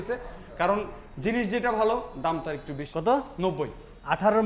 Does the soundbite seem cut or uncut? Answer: cut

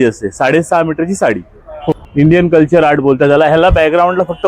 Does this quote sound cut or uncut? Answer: cut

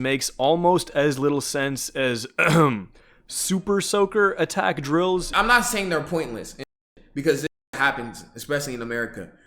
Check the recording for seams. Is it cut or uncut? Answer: cut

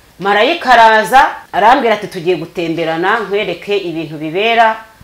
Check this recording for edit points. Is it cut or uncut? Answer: cut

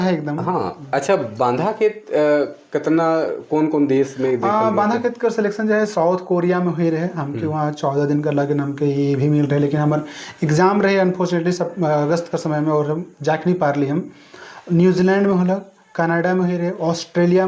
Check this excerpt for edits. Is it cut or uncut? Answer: uncut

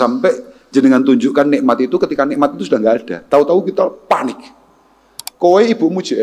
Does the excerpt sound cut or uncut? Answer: uncut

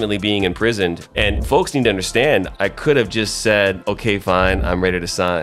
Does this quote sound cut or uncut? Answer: cut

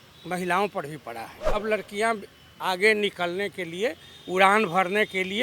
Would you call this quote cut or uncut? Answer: cut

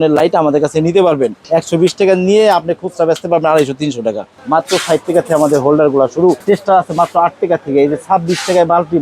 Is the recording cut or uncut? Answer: cut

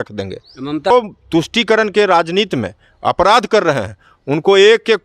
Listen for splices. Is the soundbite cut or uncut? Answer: cut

